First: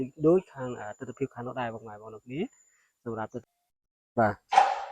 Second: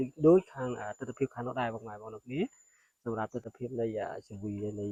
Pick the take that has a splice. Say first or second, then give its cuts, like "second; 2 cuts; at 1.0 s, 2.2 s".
first; 1 cut; at 3.5 s